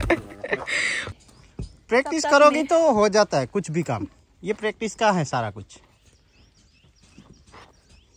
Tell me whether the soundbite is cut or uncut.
cut